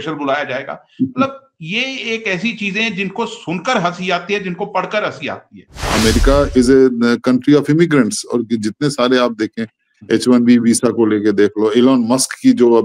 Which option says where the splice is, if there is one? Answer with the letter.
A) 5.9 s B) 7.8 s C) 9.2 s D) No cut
A